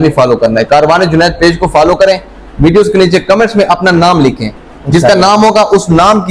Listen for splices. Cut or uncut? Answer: uncut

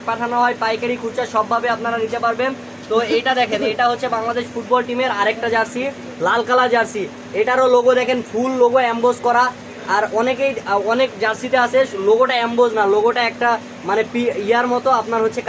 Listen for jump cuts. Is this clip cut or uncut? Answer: uncut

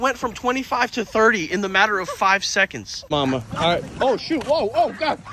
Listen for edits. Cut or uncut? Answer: cut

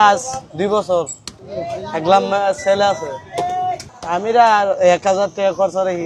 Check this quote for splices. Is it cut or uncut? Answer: uncut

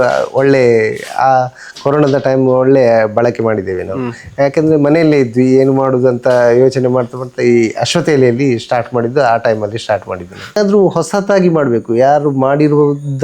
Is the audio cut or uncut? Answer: cut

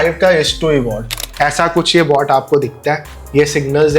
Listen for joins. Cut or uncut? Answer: cut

